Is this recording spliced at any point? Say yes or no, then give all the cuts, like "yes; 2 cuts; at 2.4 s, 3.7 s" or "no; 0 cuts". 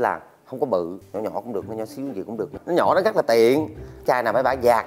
yes; 3 cuts; at 1.0 s, 2.6 s, 4.0 s